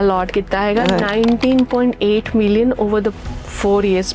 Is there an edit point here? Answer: no; 0 cuts

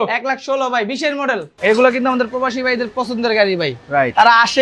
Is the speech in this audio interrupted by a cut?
yes; 1 cut; at 1.5 s

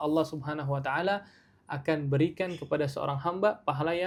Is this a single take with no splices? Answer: yes; 0 cuts

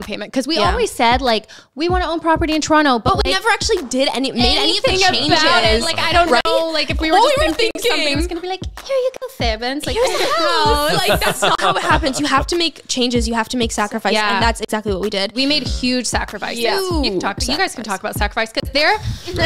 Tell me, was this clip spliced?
no; 0 cuts

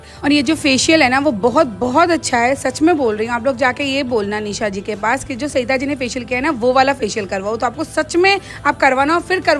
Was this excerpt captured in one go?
yes; 0 cuts

